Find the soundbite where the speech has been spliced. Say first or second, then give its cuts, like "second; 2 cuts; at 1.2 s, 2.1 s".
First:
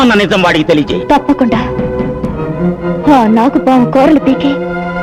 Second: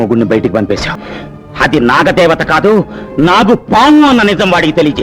second; 1 cut; at 1.0 s